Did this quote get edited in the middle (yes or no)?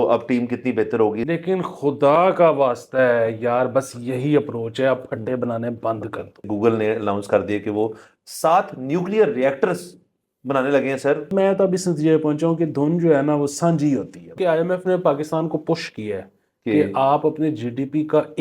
yes